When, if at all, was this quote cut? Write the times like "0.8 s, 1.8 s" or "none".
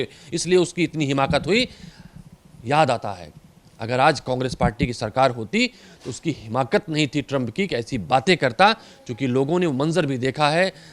none